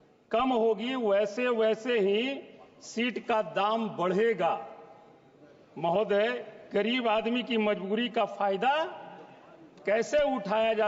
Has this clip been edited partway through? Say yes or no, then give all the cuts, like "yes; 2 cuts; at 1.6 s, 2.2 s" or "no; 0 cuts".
no; 0 cuts